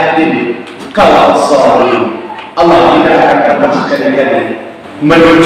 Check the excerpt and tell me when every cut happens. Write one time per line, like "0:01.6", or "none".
none